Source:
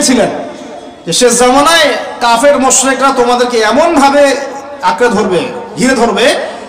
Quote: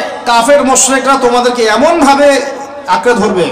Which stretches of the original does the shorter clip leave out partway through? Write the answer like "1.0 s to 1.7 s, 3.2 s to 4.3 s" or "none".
none